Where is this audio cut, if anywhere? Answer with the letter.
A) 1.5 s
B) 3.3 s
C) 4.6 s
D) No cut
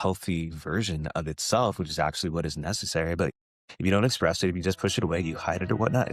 B